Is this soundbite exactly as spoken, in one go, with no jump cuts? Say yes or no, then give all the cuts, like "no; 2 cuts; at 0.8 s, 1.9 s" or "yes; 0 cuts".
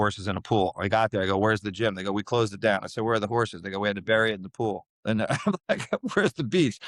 yes; 0 cuts